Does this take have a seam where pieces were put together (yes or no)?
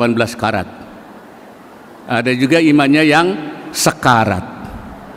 no